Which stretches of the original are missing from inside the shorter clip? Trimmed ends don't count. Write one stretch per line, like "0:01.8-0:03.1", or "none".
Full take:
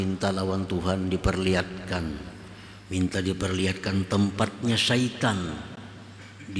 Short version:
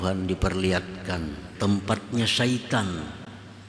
0:02.4-0:04.1

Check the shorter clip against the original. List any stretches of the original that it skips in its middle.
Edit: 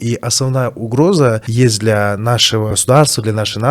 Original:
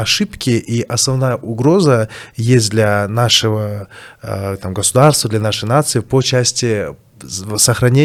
0:02.1-0:02.4
0:03.7-0:04.8

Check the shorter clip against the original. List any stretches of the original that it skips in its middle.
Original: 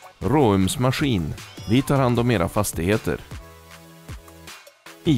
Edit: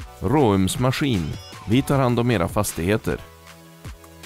0:03.2-0:03.5

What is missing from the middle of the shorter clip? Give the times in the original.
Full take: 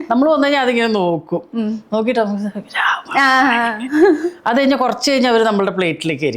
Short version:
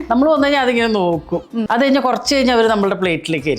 0:01.6-0:04.4

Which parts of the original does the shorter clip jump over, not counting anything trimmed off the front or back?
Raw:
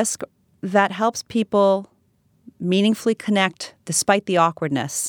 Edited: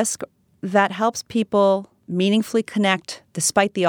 0:02.0-0:02.5

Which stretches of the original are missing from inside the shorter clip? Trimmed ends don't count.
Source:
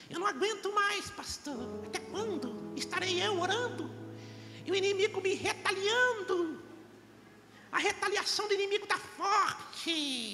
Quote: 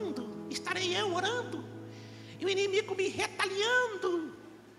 none

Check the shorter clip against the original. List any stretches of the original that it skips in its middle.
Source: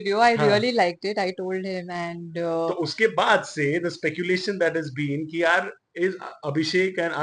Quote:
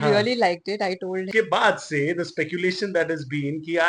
0:01.6-0:02.9

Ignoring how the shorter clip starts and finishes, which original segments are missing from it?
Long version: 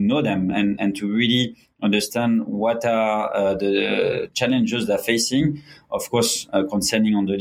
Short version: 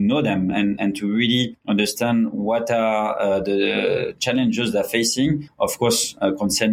0:01.6-0:01.7
0:05.6-0:05.8

